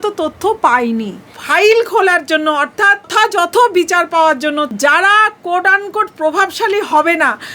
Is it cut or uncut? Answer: cut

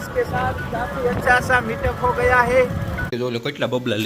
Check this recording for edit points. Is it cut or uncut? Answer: cut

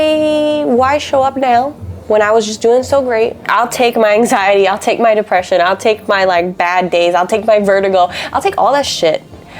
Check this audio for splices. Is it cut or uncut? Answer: cut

